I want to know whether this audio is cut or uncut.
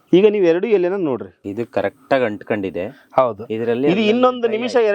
cut